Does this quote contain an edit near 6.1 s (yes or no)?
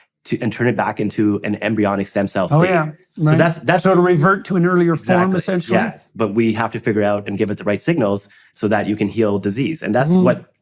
yes